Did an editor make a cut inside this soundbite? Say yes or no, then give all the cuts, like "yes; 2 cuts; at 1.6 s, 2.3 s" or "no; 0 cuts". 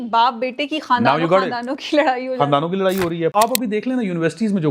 yes; 1 cut; at 3.3 s